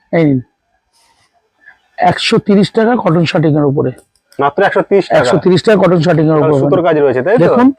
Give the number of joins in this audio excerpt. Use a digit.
0